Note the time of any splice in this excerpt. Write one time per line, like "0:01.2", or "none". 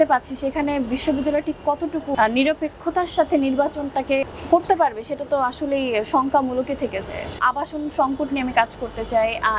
0:02.1
0:04.2
0:07.4